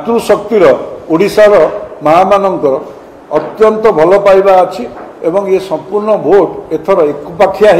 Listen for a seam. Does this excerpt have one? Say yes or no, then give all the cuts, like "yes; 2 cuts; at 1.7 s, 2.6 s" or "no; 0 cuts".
no; 0 cuts